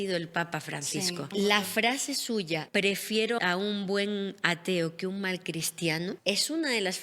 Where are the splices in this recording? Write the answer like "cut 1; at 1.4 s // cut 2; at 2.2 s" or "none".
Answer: cut 1; at 2.6 s // cut 2; at 3.4 s // cut 3; at 6.2 s